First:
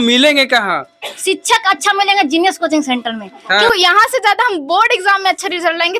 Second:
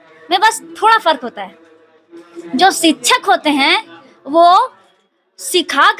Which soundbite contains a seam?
first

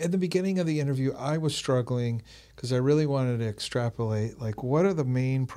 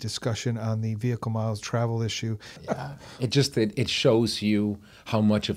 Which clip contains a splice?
second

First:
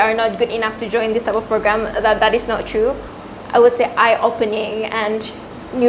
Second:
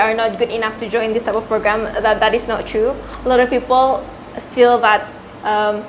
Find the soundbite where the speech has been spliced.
first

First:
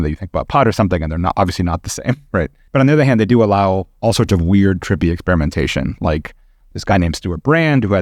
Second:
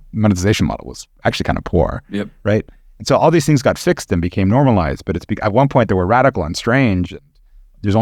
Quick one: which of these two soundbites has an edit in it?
first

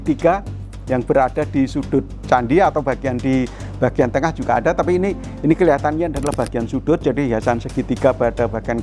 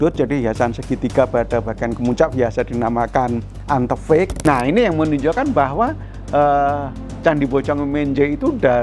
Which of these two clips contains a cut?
second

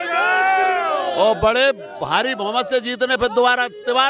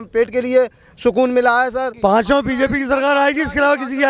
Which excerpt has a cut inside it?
second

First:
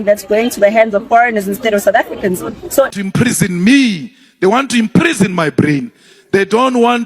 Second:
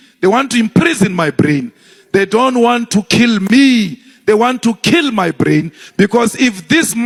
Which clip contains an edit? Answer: first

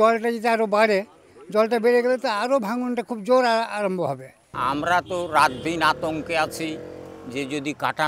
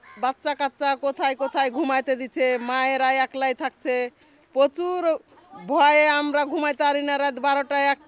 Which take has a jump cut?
first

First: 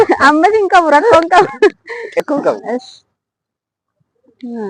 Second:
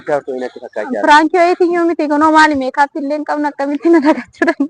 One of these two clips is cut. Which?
first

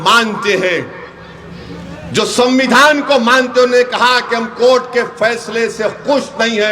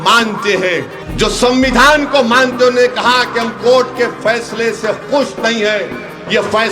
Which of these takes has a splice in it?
second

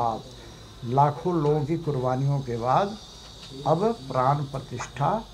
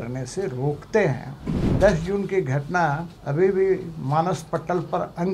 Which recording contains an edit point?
second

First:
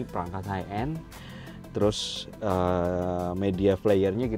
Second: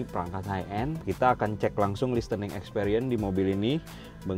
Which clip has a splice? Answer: second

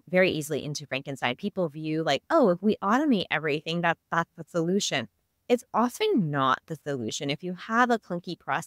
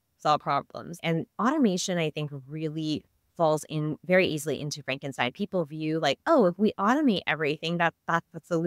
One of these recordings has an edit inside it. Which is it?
second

